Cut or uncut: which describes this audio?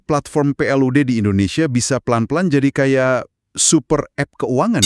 uncut